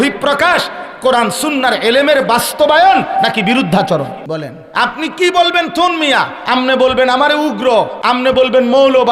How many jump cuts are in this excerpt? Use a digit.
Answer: 3